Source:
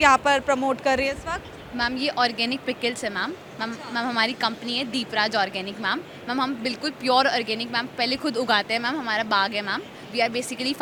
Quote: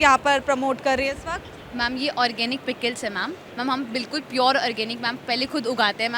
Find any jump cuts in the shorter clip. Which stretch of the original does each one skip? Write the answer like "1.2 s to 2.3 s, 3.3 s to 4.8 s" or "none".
3.4 s to 6.1 s